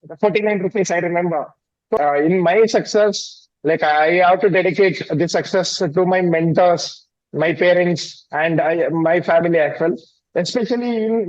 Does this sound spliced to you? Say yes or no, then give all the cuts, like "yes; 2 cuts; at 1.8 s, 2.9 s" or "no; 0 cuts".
yes; 1 cut; at 2.0 s